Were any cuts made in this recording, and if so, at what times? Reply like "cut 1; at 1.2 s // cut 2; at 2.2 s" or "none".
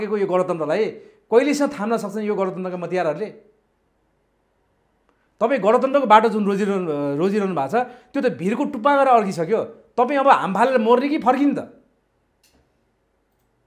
none